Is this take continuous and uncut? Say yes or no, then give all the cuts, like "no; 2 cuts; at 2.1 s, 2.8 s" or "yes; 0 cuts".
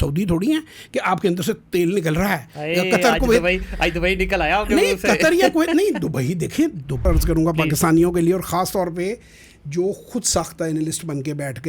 no; 1 cut; at 7.0 s